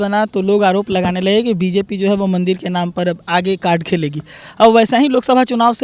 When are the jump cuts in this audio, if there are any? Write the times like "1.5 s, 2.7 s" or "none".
none